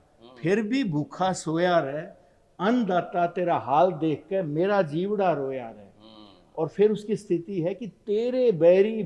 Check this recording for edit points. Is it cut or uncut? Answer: uncut